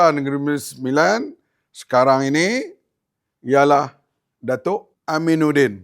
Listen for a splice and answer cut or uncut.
cut